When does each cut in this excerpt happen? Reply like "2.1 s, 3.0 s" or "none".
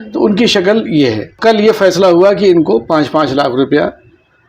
1.4 s